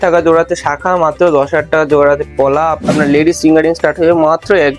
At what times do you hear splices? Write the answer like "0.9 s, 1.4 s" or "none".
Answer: 2.8 s